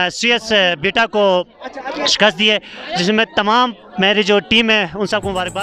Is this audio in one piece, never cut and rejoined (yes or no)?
yes